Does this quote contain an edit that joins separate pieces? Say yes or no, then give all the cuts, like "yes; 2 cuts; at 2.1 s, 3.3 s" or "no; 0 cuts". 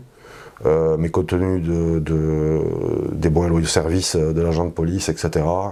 no; 0 cuts